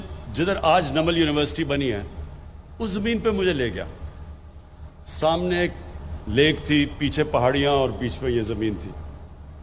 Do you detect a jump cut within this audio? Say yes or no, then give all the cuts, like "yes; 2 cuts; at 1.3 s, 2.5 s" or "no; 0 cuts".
no; 0 cuts